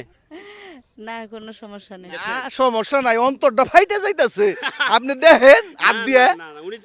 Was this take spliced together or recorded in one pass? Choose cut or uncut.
uncut